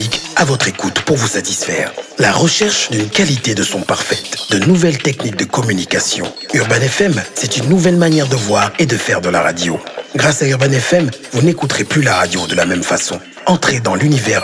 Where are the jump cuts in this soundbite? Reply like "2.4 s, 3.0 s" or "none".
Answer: none